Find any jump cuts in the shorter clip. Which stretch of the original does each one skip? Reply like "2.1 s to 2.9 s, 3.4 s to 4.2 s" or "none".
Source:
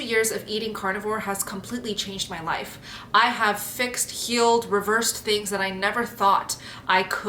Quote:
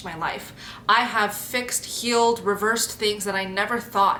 none